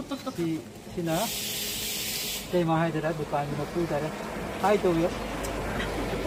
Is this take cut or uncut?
uncut